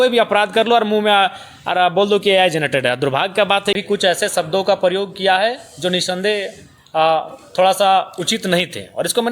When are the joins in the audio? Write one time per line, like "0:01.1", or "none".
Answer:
0:03.8